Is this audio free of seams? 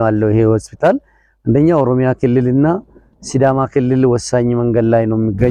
yes; 0 cuts

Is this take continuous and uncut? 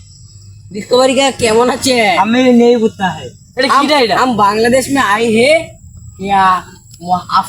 yes; 0 cuts

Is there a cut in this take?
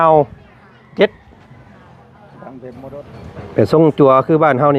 yes; 1 cut; at 3.1 s

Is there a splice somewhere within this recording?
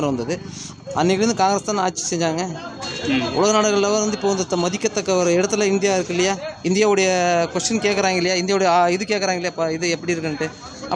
no; 0 cuts

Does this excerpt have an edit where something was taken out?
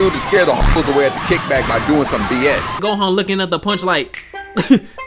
yes; 1 cut; at 2.8 s

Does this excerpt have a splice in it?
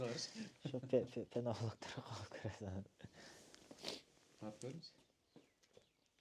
no; 0 cuts

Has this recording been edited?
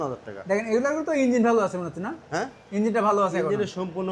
no; 0 cuts

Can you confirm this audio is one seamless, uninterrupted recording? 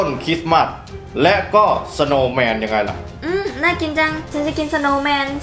no; 1 cut; at 3.1 s

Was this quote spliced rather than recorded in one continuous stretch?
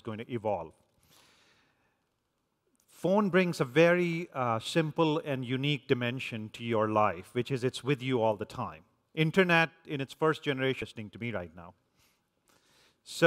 no; 0 cuts

